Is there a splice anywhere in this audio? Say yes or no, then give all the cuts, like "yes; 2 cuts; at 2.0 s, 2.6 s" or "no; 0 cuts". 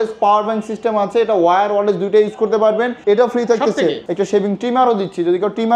yes; 2 cuts; at 3.0 s, 4.0 s